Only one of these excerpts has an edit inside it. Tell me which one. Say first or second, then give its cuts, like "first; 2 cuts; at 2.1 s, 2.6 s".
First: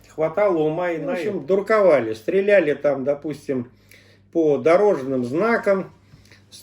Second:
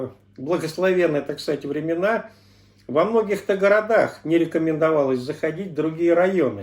first; 1 cut; at 1.1 s